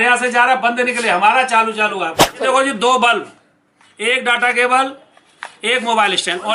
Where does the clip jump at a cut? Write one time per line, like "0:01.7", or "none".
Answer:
0:02.4